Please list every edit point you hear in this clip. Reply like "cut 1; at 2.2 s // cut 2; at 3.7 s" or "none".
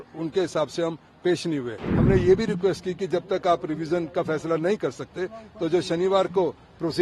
cut 1; at 1.9 s